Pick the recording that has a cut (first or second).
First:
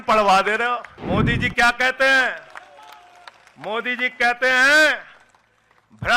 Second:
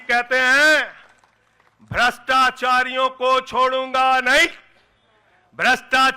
first